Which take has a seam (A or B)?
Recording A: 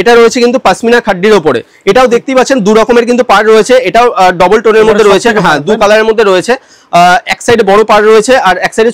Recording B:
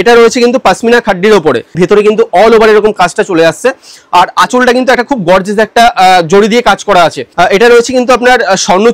B